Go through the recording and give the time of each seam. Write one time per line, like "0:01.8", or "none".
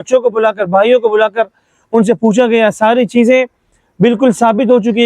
none